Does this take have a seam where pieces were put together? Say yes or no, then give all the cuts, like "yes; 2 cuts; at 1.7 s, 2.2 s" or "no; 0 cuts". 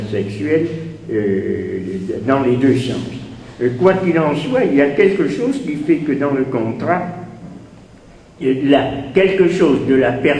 yes; 1 cut; at 8.6 s